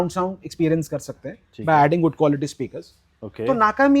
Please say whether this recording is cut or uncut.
uncut